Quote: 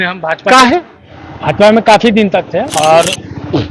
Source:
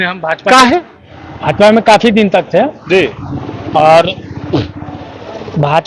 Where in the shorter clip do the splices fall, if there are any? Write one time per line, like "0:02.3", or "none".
0:02.7